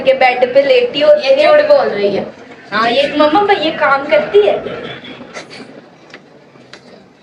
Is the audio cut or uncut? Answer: uncut